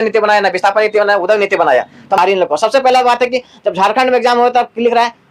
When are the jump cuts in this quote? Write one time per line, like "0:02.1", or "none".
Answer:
0:02.2